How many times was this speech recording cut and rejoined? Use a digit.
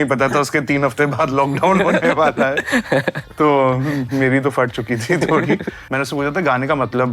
1